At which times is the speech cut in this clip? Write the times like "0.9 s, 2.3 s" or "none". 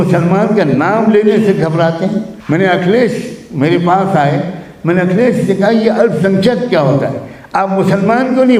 2.3 s